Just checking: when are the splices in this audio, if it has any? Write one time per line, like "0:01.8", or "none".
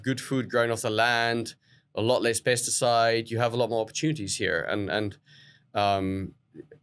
none